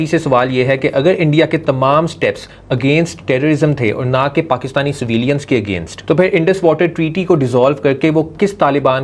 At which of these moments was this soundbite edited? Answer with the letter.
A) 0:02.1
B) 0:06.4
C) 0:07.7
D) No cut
D